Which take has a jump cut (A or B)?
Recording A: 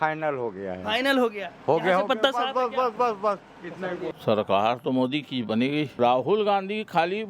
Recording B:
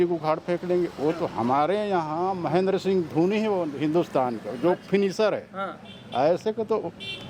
A